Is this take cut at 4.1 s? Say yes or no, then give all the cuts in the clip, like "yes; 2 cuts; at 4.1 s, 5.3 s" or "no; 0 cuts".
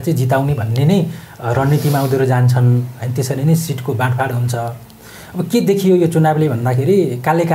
no; 0 cuts